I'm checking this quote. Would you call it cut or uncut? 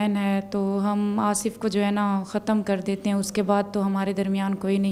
uncut